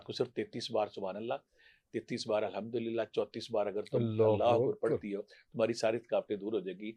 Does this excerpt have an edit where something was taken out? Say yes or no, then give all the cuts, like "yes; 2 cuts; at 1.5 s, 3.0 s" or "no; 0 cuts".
no; 0 cuts